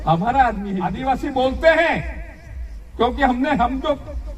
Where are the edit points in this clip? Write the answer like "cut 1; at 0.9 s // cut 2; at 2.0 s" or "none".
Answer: cut 1; at 1.0 s